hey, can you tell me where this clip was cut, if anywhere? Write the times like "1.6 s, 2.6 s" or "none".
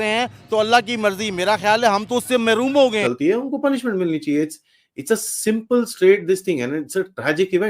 3.0 s